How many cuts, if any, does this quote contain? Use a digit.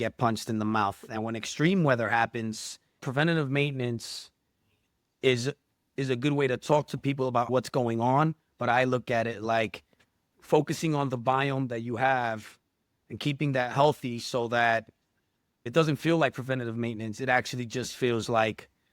3